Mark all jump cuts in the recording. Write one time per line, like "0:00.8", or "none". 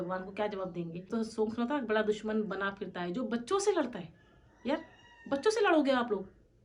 0:01.1